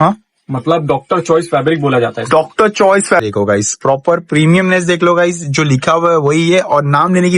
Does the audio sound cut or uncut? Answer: cut